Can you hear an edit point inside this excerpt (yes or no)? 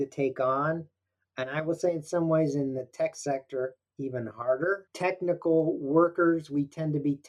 yes